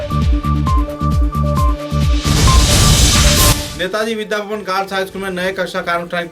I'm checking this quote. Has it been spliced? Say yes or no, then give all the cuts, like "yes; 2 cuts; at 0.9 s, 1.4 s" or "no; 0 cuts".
yes; 1 cut; at 3.6 s